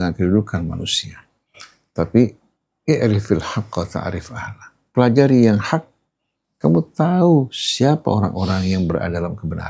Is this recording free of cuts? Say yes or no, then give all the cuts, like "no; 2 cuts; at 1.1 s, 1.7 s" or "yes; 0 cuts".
yes; 0 cuts